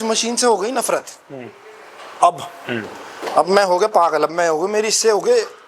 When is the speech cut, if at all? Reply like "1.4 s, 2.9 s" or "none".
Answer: none